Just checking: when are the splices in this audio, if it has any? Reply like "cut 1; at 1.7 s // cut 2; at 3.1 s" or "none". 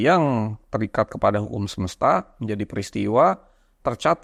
none